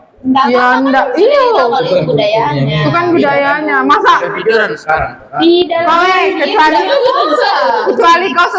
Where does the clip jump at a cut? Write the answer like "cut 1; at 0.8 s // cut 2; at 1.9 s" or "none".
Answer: none